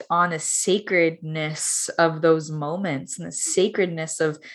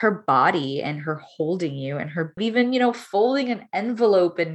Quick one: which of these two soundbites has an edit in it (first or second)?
second